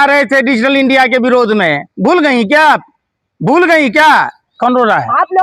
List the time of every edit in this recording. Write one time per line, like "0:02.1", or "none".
0:04.4